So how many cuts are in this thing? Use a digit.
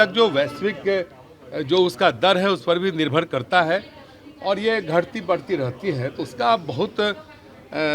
1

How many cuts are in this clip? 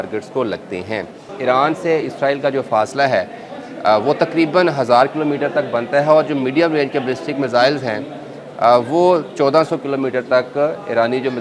1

